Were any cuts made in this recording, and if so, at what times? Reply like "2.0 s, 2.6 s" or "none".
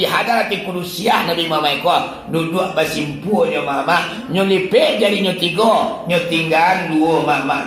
none